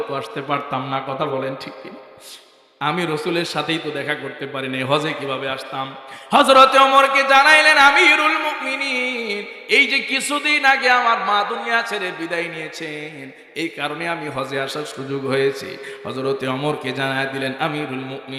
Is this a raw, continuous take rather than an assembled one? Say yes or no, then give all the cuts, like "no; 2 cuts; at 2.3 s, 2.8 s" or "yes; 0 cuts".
yes; 0 cuts